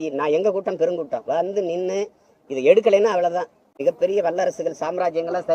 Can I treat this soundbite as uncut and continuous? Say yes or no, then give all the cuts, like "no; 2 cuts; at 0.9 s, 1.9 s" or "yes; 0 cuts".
no; 1 cut; at 3.8 s